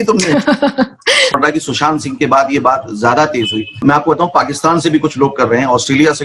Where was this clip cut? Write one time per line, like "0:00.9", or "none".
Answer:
0:01.3
0:03.8